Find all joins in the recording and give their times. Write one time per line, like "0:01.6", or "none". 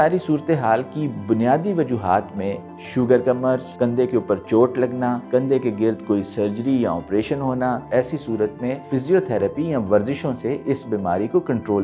0:03.7
0:05.2
0:07.8
0:08.8